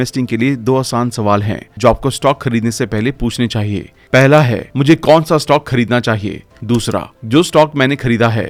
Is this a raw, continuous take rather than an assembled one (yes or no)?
yes